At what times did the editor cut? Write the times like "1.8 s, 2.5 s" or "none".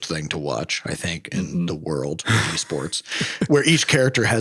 3.5 s